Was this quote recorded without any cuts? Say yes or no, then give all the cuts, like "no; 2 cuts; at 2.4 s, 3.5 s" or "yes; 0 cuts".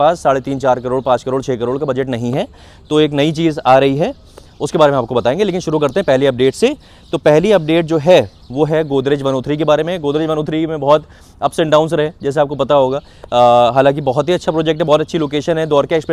yes; 0 cuts